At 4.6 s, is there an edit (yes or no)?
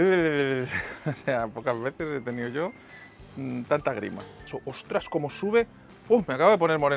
yes